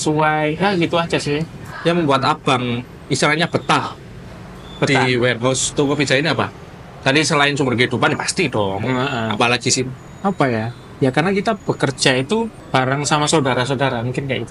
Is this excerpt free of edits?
no; 3 cuts; at 1.6 s, 10.0 s, 12.6 s

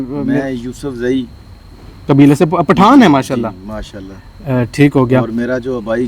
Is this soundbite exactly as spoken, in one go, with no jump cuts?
yes; 0 cuts

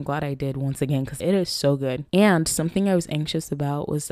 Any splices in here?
yes; 2 cuts; at 1.1 s, 2.0 s

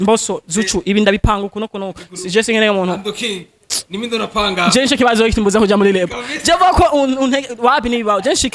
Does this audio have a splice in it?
no; 0 cuts

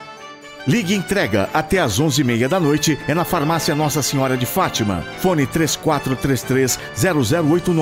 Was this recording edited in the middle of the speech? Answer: no; 0 cuts

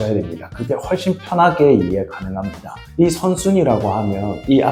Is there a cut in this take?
no; 0 cuts

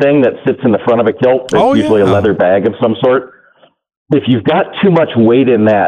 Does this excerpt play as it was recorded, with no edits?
yes; 0 cuts

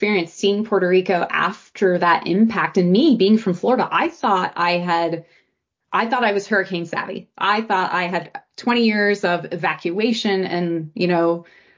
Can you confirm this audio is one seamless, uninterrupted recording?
yes; 0 cuts

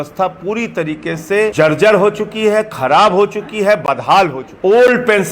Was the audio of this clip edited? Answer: yes; 2 cuts; at 1.5 s, 4.4 s

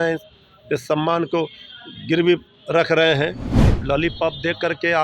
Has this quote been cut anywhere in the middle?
yes; 1 cut; at 3.7 s

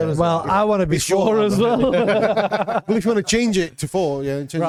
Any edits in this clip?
no; 0 cuts

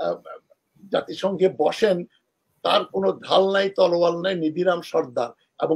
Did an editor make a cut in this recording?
no; 0 cuts

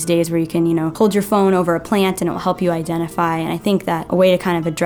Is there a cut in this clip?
yes; 2 cuts; at 0.9 s, 4.1 s

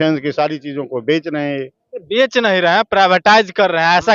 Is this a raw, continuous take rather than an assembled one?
yes; 0 cuts

